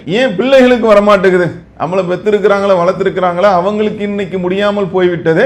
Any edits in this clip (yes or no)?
no